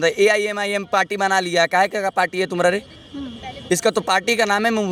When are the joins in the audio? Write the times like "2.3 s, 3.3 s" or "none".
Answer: none